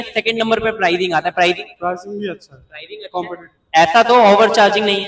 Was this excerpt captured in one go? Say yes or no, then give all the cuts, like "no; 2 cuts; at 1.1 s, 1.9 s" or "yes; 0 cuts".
yes; 0 cuts